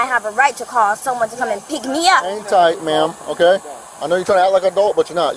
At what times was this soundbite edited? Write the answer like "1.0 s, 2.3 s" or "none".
2.4 s